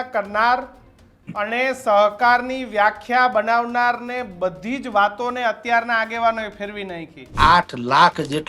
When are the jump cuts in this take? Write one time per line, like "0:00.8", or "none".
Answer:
0:07.3